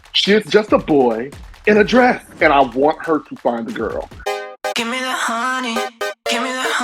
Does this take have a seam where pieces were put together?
yes; 1 cut; at 4.2 s

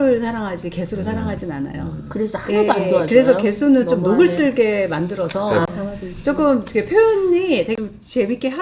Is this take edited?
no; 0 cuts

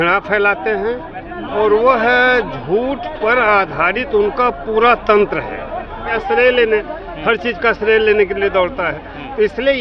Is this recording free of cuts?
no; 1 cut; at 6.1 s

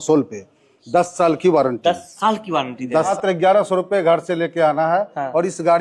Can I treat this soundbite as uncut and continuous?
no; 1 cut; at 3.1 s

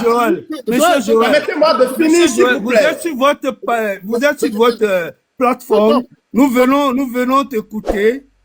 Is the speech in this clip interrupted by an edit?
no; 0 cuts

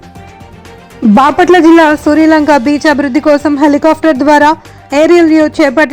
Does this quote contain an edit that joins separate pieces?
yes; 1 cut; at 1.0 s

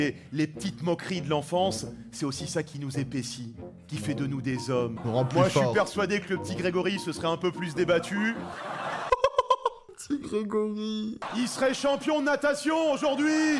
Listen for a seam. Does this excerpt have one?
yes; 2 cuts; at 4.9 s, 9.9 s

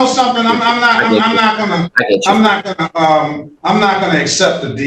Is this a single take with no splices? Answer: yes; 0 cuts

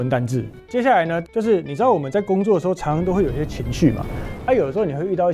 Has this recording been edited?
yes; 1 cut; at 1.0 s

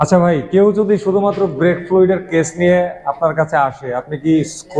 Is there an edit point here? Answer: no; 0 cuts

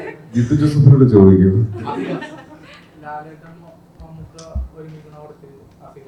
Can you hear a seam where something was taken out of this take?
no; 0 cuts

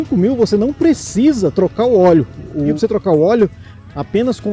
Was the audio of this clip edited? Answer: yes; 1 cut; at 2.7 s

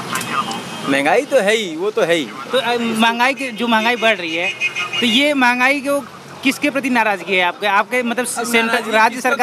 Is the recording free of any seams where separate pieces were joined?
yes; 0 cuts

